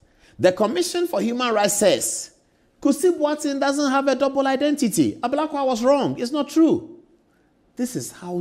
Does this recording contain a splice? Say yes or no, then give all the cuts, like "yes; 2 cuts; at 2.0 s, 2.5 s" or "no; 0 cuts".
yes; 1 cut; at 6.9 s